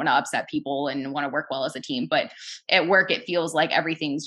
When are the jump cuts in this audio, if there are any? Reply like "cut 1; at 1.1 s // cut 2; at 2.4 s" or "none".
none